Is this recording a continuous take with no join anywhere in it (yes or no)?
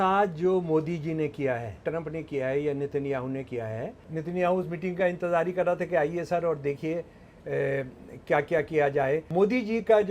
no